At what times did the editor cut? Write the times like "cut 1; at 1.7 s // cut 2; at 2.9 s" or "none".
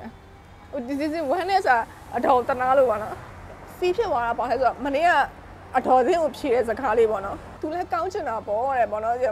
cut 1; at 7.4 s

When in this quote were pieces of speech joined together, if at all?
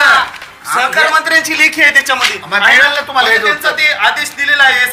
none

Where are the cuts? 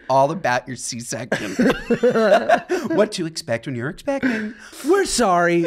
cut 1; at 4.7 s

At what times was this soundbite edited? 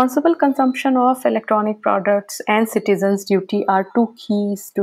none

